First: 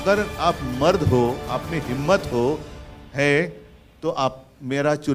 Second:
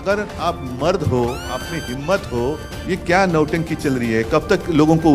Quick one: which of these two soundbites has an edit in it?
second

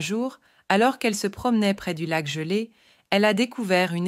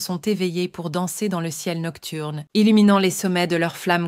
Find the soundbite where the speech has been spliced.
second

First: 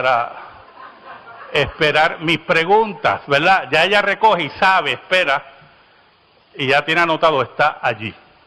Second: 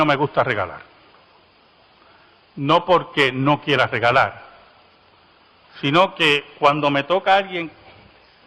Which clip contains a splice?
second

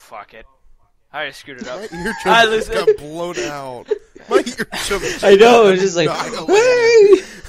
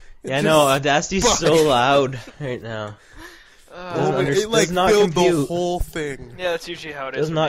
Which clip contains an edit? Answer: first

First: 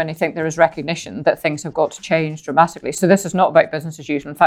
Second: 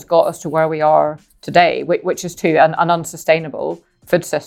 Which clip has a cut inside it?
first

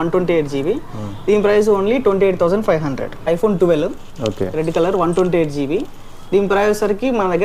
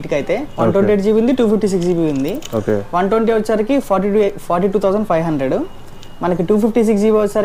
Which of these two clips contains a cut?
first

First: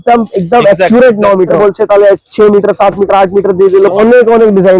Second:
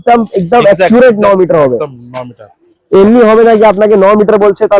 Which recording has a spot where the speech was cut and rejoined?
first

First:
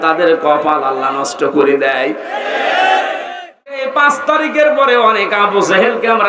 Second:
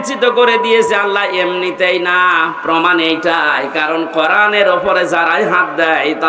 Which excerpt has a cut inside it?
first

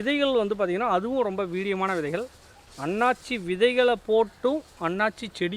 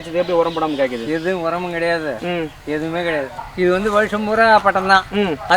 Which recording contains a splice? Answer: second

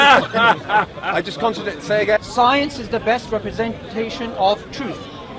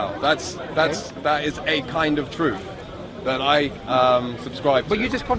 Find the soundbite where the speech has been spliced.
first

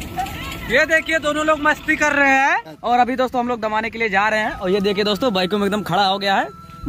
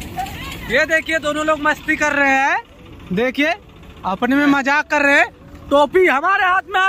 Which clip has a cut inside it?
first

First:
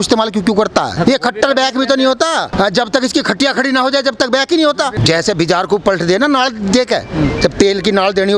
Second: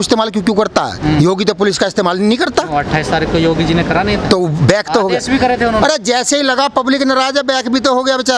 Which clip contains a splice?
first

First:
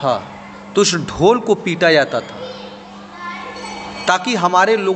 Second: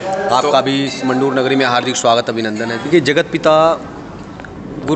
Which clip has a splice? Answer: second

